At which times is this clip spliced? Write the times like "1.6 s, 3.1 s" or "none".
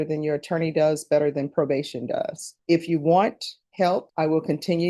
2.4 s, 3.9 s